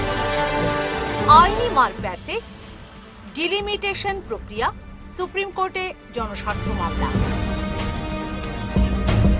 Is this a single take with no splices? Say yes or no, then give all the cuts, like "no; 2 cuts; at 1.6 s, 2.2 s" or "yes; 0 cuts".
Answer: no; 1 cut; at 1.1 s